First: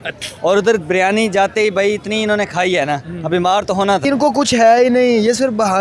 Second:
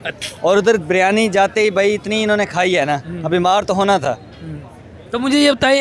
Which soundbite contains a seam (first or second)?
first